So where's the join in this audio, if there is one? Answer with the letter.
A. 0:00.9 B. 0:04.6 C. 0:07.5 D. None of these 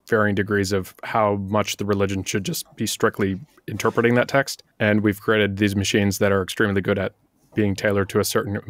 B